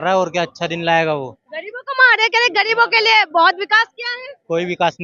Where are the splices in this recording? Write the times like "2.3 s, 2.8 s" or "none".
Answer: none